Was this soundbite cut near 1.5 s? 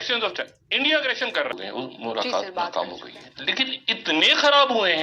yes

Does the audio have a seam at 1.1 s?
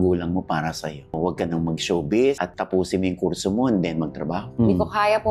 yes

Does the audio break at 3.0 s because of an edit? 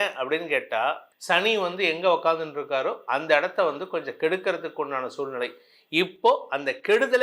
no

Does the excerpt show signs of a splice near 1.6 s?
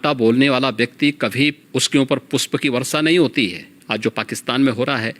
yes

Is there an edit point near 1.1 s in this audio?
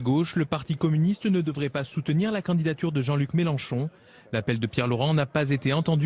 yes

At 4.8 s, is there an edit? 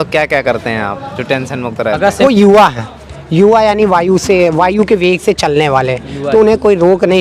no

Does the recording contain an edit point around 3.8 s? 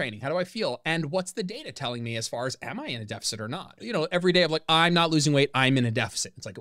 yes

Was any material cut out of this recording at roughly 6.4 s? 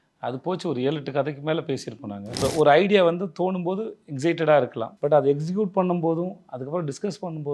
no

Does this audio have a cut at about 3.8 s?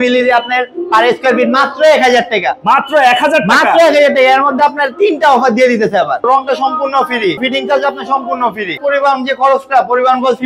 no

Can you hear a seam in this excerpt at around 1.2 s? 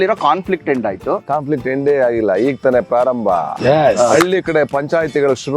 yes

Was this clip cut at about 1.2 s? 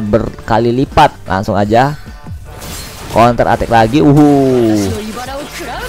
yes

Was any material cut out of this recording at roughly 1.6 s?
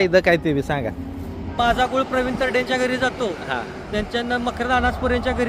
yes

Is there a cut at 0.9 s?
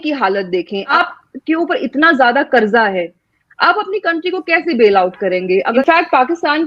yes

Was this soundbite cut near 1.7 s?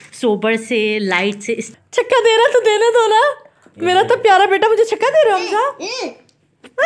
yes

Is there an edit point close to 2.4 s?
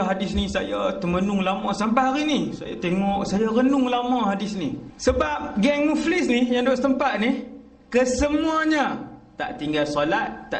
no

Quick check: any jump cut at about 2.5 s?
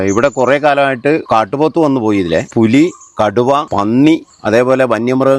yes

